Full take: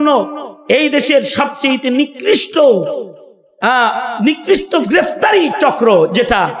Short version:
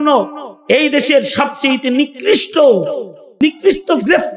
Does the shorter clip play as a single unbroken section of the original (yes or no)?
no